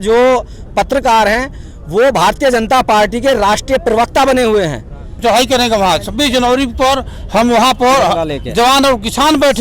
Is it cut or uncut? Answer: cut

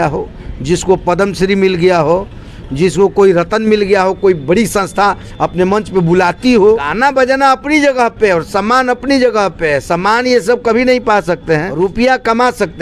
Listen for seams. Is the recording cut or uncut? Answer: cut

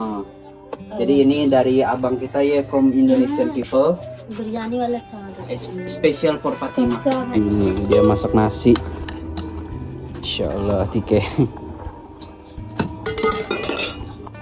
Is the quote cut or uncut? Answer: cut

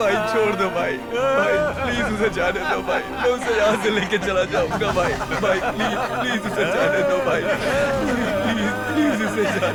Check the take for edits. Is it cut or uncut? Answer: uncut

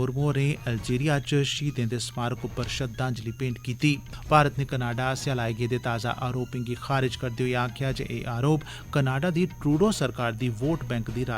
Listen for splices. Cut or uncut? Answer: cut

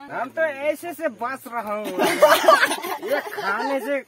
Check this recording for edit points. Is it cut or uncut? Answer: cut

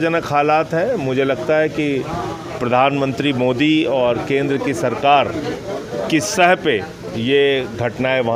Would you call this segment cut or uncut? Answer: uncut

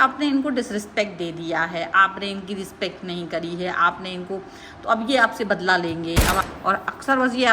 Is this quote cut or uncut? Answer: cut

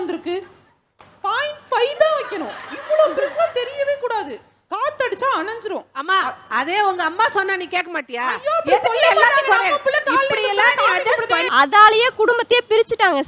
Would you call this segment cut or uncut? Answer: cut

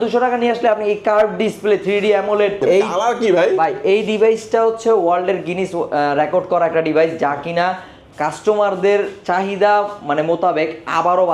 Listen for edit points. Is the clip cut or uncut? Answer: cut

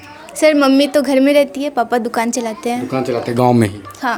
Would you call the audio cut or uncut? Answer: uncut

